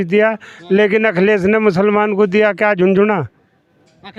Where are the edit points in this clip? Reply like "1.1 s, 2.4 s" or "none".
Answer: none